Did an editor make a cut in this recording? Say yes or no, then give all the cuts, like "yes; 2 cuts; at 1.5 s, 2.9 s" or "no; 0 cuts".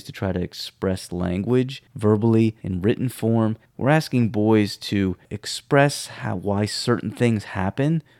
yes; 3 cuts; at 1.8 s, 2.7 s, 3.7 s